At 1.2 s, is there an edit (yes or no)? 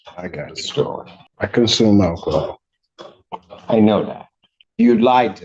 yes